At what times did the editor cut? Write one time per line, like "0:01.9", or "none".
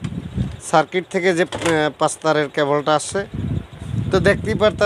0:03.4